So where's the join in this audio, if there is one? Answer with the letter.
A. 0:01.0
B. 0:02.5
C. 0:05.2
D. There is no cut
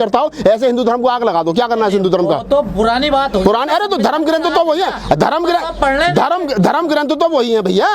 D